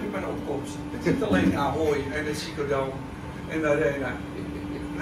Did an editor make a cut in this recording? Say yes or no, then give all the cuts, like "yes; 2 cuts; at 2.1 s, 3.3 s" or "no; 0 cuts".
no; 0 cuts